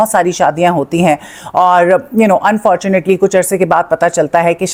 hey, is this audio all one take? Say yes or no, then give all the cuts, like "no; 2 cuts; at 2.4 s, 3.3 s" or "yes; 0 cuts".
yes; 0 cuts